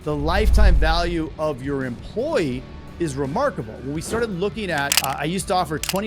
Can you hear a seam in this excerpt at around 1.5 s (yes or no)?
no